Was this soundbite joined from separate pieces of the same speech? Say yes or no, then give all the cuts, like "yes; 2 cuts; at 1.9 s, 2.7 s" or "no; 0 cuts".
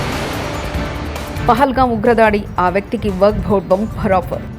yes; 1 cut; at 1.4 s